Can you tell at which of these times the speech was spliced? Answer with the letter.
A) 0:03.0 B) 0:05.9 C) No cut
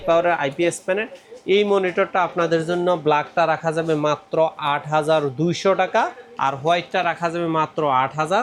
C